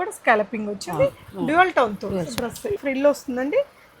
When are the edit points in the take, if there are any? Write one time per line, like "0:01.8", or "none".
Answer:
0:02.8

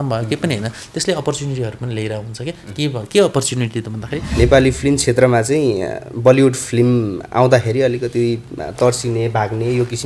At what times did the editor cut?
0:04.2

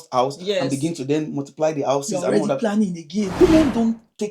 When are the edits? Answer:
0:03.3

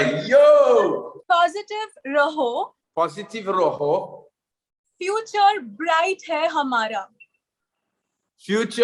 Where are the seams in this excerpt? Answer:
0:01.1
0:02.8

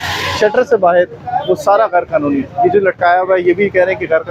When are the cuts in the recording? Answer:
none

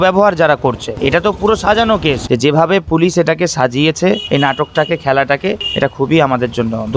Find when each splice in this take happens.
0:02.2
0:04.2
0:05.7

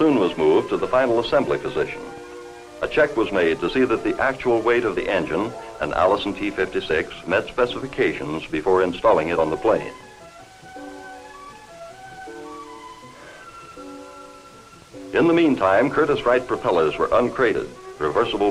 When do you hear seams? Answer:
0:01.3

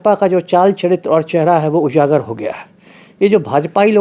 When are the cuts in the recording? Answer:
none

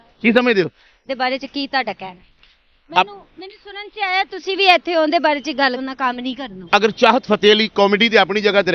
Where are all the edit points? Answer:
0:00.9
0:05.8

